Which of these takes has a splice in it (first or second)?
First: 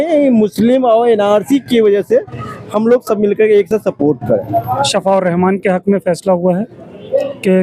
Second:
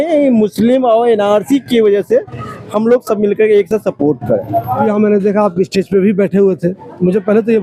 first